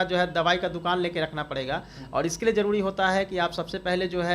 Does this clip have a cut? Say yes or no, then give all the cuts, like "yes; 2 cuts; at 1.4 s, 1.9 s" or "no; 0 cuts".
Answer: no; 0 cuts